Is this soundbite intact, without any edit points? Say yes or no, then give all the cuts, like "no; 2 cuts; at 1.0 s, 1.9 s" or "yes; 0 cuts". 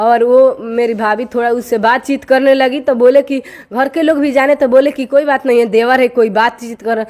yes; 0 cuts